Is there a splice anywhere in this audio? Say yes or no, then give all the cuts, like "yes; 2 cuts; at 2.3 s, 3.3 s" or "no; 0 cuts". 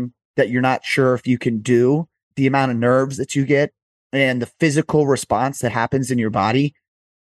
yes; 1 cut; at 2.2 s